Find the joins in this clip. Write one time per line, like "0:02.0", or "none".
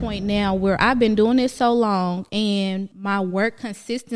0:02.4